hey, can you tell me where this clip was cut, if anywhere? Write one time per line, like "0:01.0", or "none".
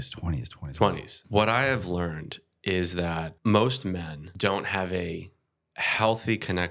0:01.1
0:03.3
0:04.2